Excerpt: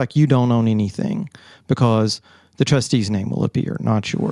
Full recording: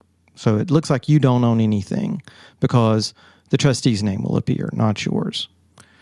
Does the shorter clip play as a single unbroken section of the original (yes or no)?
yes